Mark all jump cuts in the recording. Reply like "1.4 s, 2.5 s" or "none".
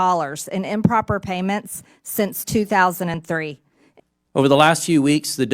3.9 s

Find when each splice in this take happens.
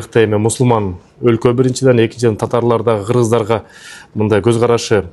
none

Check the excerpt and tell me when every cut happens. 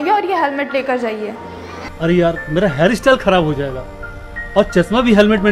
1.3 s

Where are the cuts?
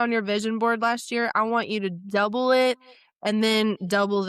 none

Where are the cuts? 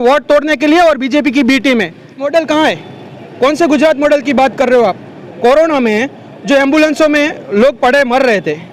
2.2 s

